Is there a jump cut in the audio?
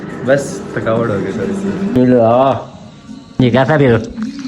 yes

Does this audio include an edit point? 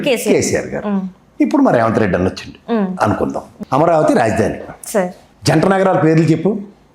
yes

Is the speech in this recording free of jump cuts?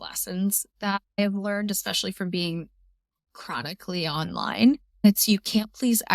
no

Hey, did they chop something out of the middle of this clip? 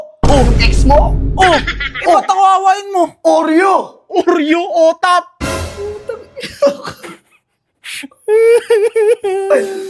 no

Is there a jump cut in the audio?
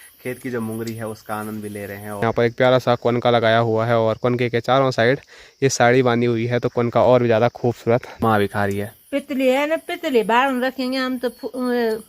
yes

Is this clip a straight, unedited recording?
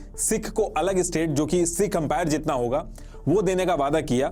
yes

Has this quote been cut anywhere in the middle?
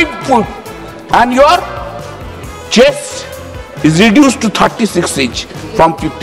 no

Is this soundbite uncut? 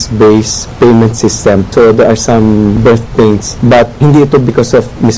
no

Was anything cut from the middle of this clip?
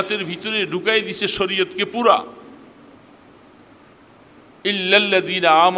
no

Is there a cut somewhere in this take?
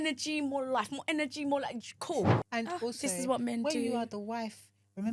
yes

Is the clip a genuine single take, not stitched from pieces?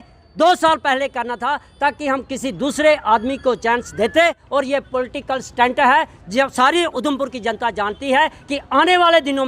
no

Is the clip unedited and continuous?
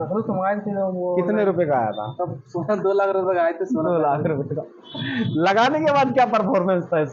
yes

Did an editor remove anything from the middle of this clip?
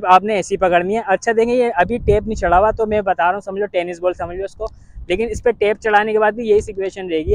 no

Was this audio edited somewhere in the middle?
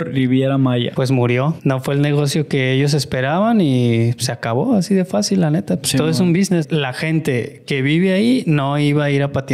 yes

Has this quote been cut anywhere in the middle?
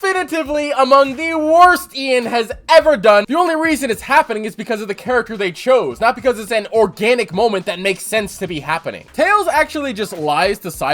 yes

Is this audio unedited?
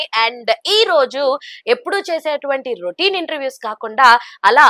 yes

